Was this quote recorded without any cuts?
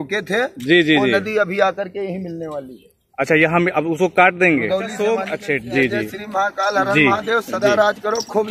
no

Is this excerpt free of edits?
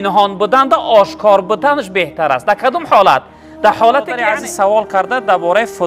no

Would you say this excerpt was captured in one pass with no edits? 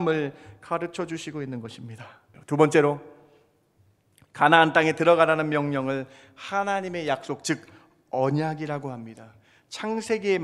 no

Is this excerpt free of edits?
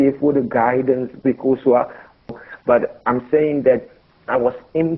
no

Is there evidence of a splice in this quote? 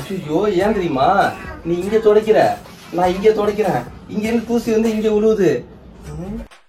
no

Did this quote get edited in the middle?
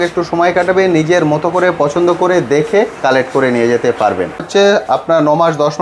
yes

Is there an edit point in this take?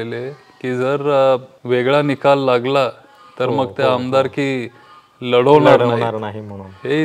yes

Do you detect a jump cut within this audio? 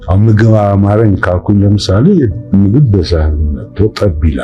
yes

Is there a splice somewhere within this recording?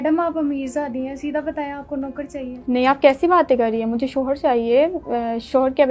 yes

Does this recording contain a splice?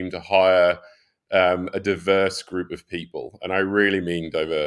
no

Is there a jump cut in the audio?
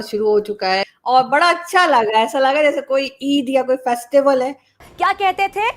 yes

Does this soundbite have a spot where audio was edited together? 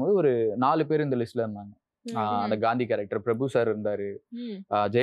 no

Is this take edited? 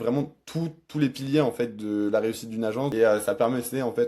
yes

